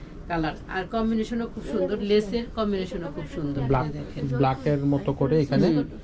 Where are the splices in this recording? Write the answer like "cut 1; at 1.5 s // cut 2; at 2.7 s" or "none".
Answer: none